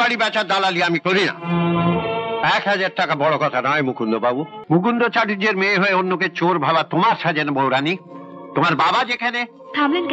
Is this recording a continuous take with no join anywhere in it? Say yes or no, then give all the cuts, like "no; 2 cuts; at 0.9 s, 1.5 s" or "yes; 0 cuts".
no; 1 cut; at 4.6 s